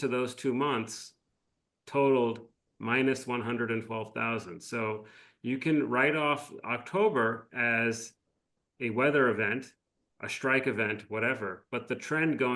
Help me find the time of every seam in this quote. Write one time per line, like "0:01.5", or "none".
none